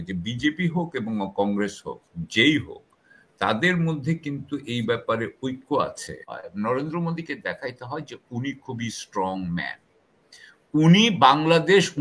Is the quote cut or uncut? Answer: cut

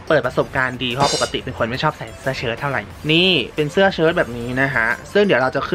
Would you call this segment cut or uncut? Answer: uncut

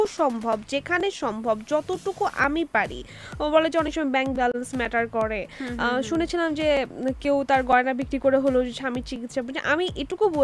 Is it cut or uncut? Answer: uncut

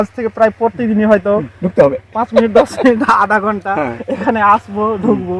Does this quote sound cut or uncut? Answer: uncut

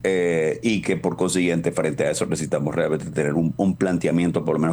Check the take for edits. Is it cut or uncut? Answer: uncut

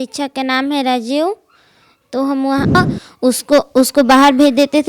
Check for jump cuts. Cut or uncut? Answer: cut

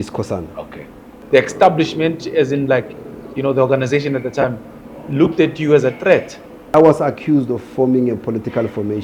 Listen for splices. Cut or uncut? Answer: cut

